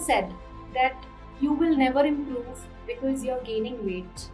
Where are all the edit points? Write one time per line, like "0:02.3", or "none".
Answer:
none